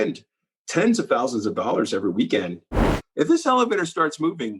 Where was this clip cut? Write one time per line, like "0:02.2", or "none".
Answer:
0:02.9